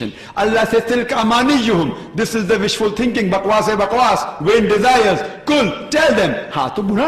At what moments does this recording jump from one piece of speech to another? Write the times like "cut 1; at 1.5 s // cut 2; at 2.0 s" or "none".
none